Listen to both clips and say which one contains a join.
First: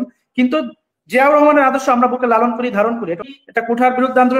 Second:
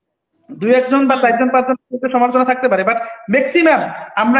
first; 1 cut; at 3.3 s

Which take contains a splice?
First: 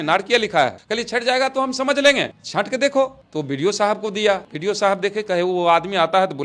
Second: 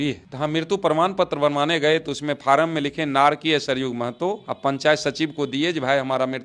first; 1 cut; at 4.5 s

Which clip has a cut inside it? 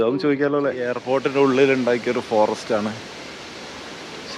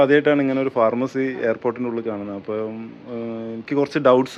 first; 1 cut; at 1.0 s

